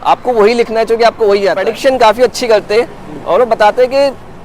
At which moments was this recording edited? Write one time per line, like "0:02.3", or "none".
0:01.7